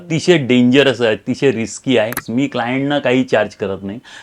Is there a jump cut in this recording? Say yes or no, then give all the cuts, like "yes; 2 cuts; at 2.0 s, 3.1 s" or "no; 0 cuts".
yes; 1 cut; at 2.2 s